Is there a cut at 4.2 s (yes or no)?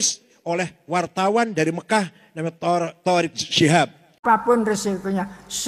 yes